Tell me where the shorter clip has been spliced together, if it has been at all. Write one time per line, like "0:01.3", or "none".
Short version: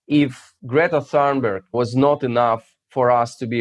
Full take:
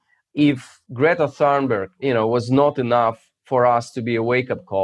0:01.7

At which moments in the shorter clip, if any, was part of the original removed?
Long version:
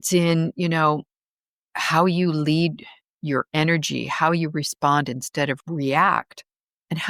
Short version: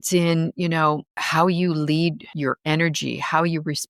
0:01.1
0:02.3

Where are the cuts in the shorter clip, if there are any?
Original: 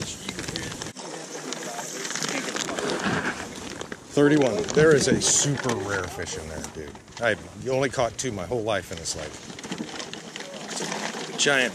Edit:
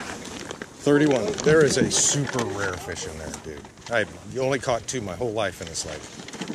none

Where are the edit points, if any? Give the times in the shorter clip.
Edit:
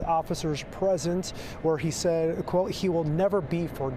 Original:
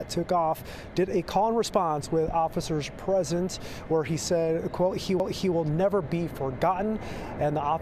0:02.8

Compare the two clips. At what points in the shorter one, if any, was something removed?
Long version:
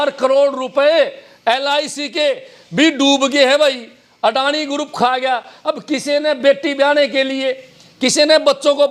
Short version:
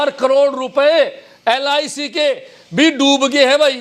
none

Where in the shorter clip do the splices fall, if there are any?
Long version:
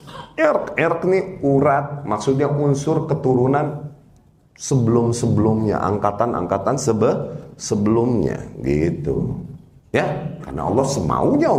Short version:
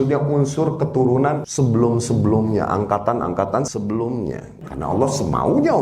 0:01.5
0:03.7
0:04.6

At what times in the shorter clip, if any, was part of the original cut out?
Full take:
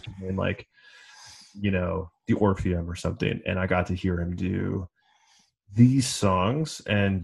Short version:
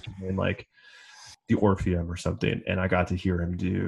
0:01.4

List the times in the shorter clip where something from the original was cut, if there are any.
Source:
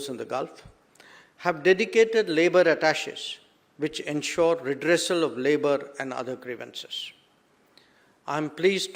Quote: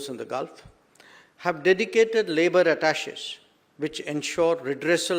none

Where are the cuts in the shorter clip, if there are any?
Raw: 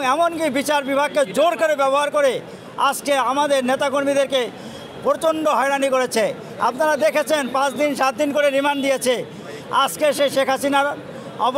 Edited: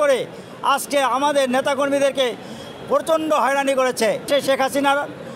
0:04.3

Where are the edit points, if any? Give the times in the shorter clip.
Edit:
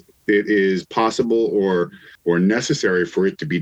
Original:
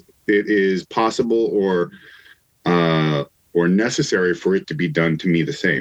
0:02.1

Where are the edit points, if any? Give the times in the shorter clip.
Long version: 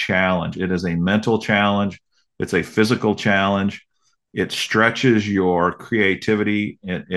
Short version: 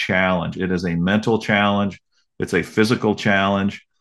none

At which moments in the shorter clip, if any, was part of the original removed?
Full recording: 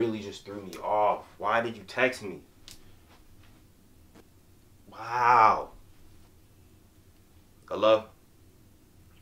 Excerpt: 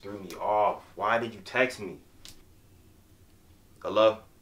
0:02.4

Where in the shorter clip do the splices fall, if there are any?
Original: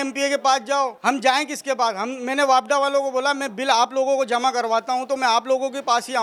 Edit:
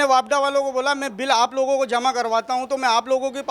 none

